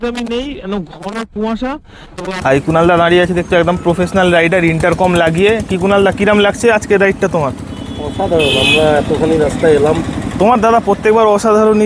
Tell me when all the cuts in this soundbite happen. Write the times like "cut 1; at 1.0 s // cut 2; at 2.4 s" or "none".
cut 1; at 2.2 s